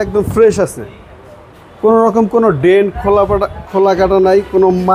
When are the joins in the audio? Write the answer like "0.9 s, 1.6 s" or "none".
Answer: none